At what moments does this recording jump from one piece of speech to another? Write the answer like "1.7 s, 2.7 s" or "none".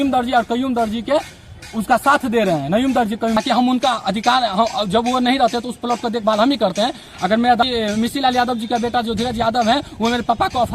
3.4 s, 7.6 s